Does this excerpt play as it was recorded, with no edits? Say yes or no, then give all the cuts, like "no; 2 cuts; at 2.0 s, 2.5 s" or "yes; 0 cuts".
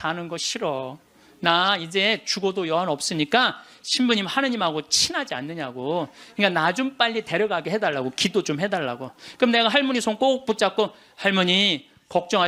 yes; 0 cuts